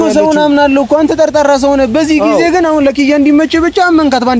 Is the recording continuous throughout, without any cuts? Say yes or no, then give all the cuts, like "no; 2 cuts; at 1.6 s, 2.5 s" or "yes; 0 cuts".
yes; 0 cuts